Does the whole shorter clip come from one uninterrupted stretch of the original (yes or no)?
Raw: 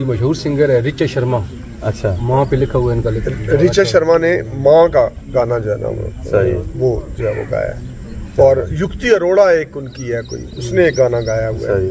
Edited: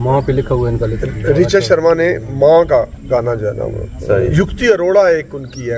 no